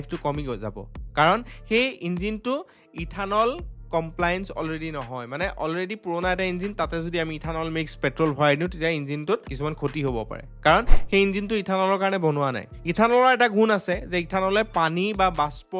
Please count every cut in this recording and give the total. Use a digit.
0